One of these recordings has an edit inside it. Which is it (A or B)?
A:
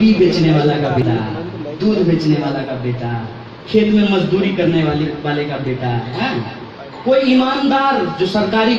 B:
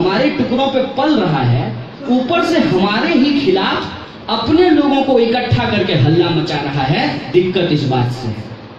A